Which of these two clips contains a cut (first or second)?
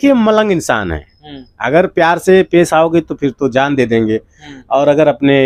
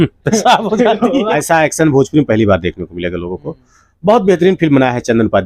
second